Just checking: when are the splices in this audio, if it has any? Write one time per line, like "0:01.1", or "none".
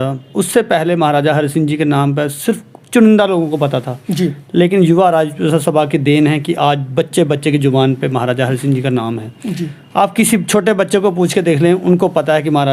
none

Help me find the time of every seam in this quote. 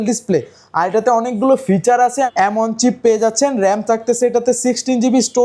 0:02.1

